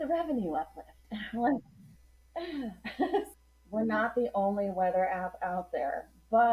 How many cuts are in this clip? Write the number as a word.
one